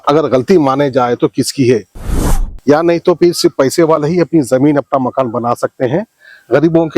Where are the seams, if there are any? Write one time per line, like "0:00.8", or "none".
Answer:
0:02.1